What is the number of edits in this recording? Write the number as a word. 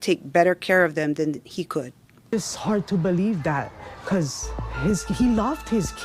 one